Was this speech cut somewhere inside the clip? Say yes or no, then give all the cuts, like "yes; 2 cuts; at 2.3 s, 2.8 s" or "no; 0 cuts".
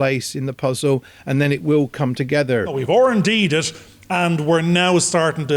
yes; 1 cut; at 2.8 s